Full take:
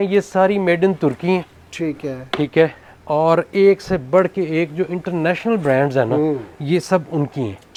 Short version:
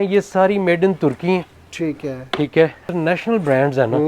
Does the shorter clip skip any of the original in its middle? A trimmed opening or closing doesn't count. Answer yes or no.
yes